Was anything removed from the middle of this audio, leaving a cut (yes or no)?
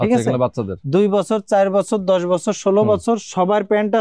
no